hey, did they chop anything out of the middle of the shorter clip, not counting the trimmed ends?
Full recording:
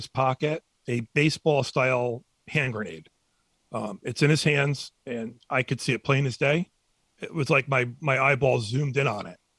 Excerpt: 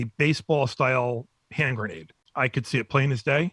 yes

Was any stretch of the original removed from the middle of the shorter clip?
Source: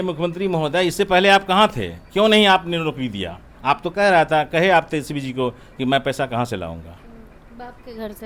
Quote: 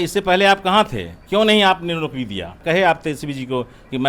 yes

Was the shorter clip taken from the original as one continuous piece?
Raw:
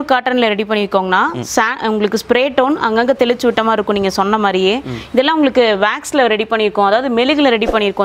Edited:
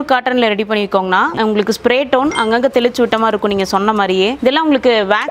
no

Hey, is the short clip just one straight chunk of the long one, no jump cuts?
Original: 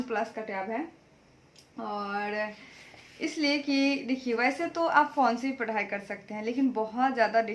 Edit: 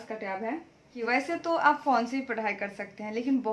no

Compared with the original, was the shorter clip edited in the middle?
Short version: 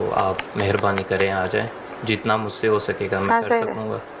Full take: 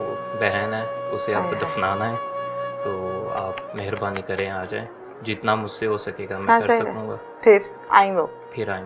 no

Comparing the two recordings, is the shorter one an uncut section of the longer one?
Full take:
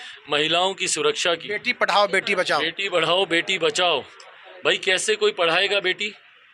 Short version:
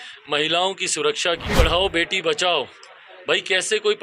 no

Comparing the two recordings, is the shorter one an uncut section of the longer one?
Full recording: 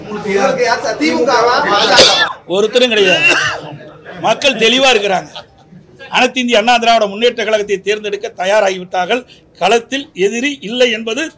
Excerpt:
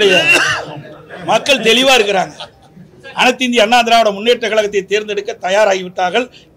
yes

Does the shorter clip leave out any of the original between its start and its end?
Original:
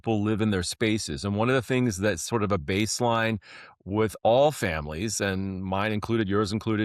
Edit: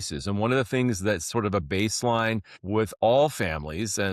yes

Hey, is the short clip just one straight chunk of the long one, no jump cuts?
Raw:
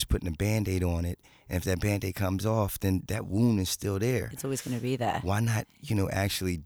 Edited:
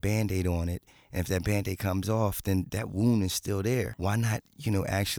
no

